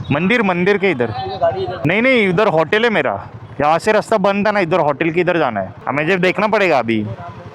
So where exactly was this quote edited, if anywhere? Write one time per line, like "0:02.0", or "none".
0:01.8
0:05.8